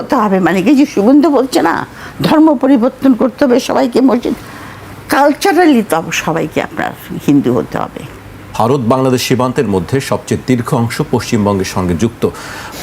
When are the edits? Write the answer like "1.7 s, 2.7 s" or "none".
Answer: 8.4 s

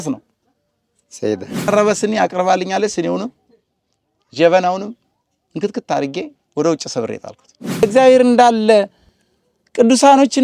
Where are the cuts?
1.7 s, 7.8 s

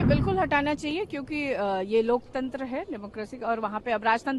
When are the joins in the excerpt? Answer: none

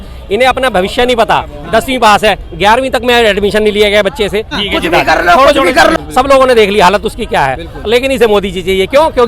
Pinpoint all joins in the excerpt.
4.5 s, 5.9 s

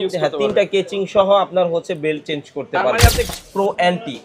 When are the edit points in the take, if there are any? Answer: 3.3 s

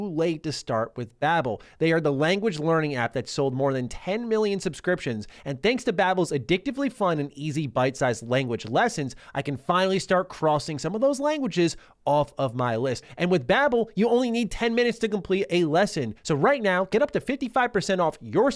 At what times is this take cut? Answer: 13.0 s, 16.1 s

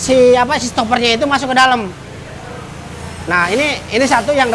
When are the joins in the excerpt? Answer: none

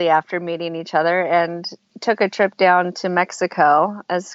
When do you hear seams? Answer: none

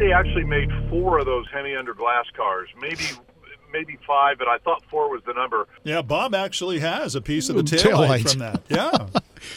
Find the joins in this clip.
5.8 s

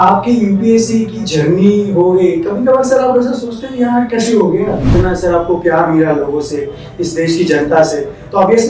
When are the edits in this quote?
4.9 s

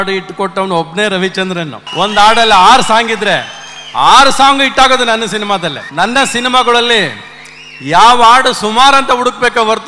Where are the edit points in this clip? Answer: 1.8 s, 5.8 s

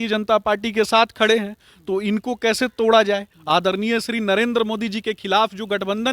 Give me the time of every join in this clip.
3.3 s

